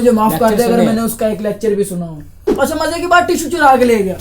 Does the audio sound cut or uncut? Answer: cut